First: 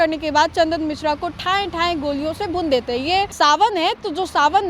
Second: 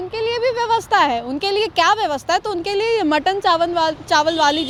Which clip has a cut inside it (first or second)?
first